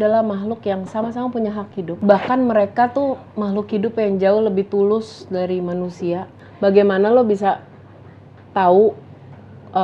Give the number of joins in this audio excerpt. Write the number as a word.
two